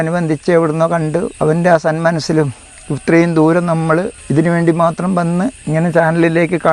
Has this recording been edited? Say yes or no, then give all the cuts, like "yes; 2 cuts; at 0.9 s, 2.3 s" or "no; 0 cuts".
yes; 3 cuts; at 1.3 s, 4.2 s, 5.6 s